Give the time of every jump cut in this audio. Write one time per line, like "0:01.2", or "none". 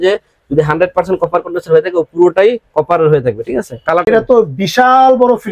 0:04.0